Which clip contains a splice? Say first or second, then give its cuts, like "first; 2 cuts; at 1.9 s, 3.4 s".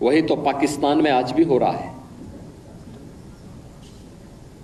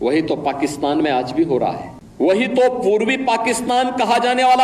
second; 1 cut; at 2.2 s